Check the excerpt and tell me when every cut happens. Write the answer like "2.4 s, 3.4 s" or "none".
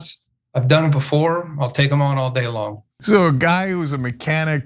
2.8 s